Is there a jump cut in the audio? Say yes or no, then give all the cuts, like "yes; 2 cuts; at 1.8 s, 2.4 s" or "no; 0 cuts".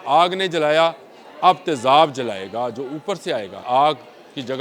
yes; 1 cut; at 3.6 s